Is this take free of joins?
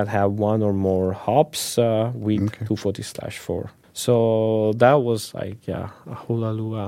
no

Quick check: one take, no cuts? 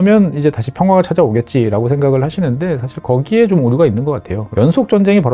no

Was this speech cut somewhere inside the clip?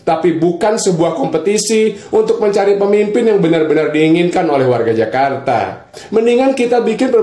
yes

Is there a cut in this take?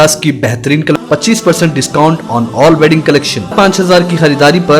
yes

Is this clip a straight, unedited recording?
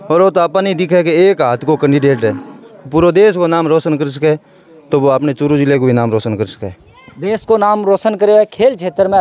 yes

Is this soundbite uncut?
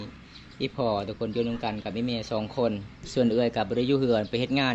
no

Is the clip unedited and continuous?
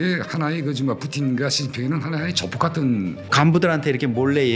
no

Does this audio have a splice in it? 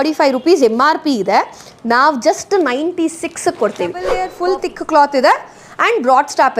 yes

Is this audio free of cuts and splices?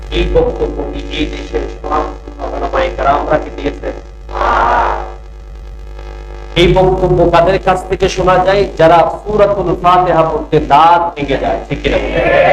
yes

